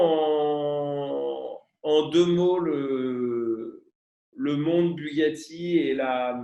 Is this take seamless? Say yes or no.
yes